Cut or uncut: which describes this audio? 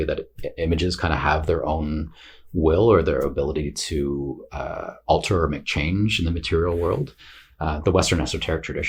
uncut